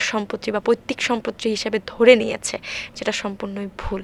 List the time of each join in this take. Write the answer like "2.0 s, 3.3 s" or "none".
none